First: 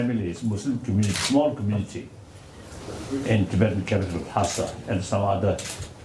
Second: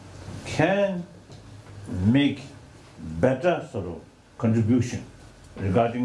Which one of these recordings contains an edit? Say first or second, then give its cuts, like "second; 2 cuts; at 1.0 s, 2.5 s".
second; 1 cut; at 3.9 s